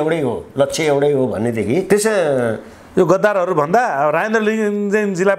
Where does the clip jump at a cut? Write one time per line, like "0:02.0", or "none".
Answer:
0:01.9